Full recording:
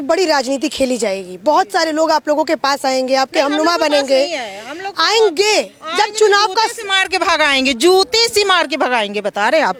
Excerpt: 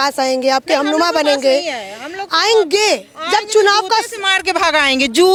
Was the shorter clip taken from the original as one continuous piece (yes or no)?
yes